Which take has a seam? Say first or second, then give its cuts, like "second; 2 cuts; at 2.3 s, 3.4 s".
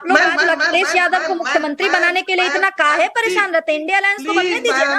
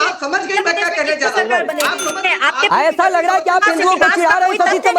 second; 1 cut; at 2.1 s